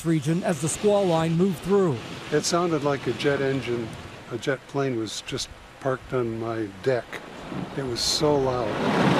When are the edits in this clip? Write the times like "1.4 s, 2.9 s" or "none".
none